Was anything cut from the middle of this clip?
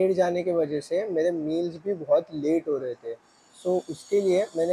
no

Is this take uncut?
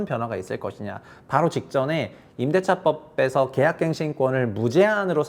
yes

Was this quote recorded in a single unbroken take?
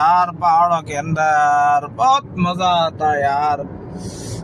yes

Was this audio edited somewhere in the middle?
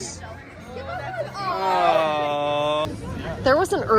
yes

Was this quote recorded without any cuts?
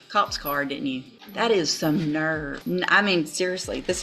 no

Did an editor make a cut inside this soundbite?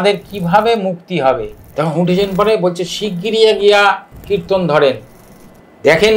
yes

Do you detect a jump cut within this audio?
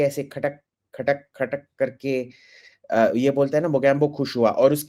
no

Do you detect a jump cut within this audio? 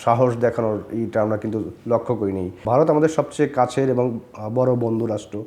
yes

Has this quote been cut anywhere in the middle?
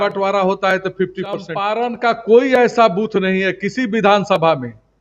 yes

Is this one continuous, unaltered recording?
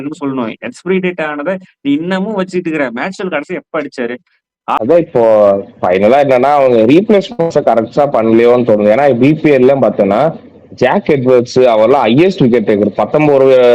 no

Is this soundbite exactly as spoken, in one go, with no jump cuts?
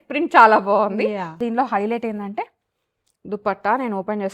no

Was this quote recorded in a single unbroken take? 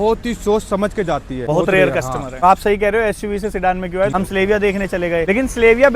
no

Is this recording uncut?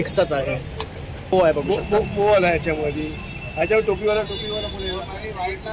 no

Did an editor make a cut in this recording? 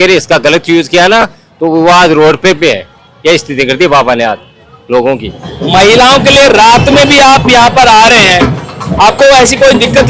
no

